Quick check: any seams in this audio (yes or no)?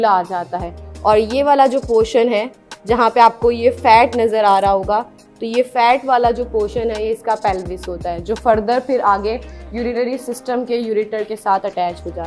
no